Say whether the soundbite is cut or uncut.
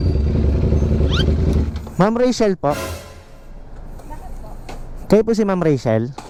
uncut